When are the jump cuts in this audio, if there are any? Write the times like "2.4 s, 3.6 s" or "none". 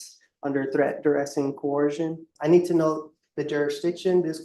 2.3 s